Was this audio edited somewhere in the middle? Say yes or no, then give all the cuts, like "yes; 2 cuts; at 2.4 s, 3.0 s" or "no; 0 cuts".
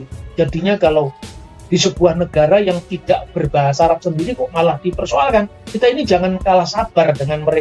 yes; 1 cut; at 5.6 s